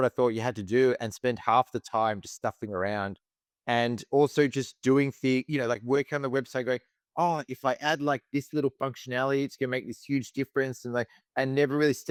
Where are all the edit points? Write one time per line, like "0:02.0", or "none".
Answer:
none